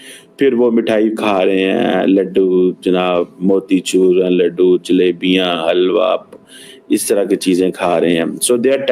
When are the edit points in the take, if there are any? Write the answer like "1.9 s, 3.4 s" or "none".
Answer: none